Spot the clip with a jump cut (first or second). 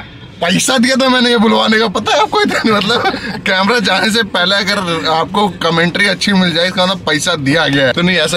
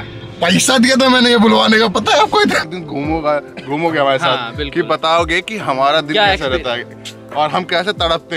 second